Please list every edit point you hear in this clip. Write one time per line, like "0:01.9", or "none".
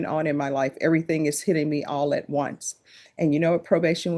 none